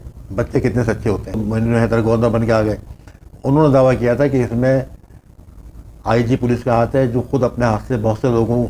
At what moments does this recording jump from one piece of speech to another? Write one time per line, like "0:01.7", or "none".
0:01.4